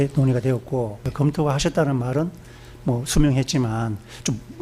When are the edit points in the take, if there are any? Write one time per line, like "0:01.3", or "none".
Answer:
0:01.1